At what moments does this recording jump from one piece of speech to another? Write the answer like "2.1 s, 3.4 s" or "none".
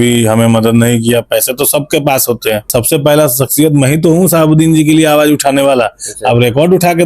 2.7 s